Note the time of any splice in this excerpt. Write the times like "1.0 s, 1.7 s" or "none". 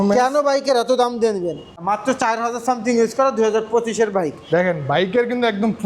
1.7 s, 4.4 s